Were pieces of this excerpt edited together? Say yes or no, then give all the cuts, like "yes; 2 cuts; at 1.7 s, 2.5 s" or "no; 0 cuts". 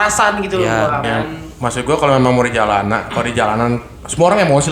yes; 1 cut; at 1.0 s